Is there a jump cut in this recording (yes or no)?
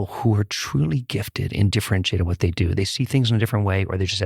no